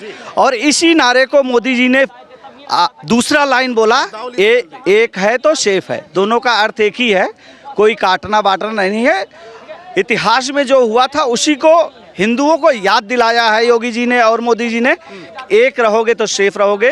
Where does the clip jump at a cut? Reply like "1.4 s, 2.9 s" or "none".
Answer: none